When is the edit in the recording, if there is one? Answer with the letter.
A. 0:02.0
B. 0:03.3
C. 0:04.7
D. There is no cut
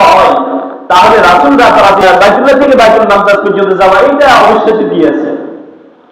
A